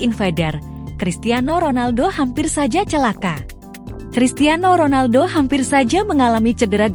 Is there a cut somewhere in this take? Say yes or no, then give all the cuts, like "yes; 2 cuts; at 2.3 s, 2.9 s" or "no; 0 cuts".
no; 0 cuts